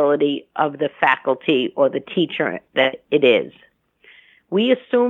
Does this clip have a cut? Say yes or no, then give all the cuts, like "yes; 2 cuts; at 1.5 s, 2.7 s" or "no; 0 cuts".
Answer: no; 0 cuts